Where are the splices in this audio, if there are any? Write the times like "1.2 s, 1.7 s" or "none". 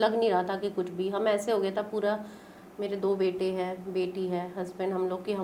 none